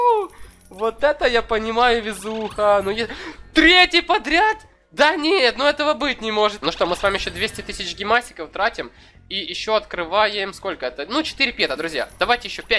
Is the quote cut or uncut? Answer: cut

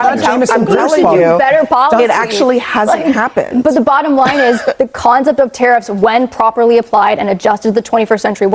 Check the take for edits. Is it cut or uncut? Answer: uncut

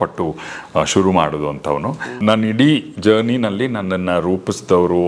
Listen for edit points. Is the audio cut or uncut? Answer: cut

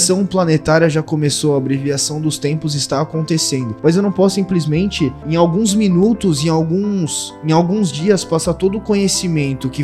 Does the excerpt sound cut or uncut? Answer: cut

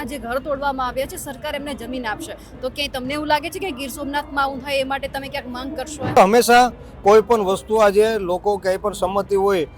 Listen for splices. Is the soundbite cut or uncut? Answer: cut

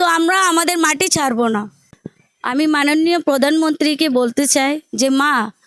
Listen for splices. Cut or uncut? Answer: cut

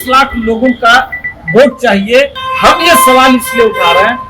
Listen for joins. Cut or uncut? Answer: cut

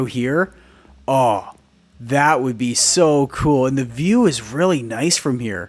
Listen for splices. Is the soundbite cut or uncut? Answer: uncut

